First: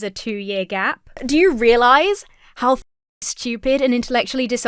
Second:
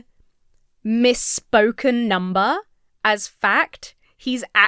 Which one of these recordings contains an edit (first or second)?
first